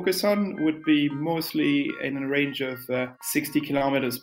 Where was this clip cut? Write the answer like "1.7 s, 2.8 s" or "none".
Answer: 3.2 s